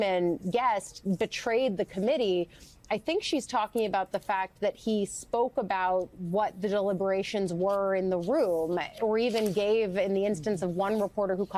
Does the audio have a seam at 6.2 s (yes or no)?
no